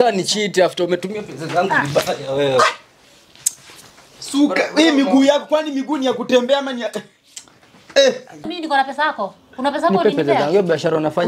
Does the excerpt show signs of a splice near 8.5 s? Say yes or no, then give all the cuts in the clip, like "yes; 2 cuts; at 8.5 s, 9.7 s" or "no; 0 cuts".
yes; 1 cut; at 8.5 s